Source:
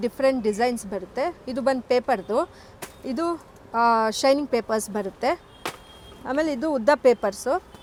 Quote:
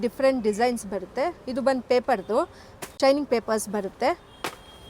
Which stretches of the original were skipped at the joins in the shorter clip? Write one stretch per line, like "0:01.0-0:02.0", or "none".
0:02.9-0:04.2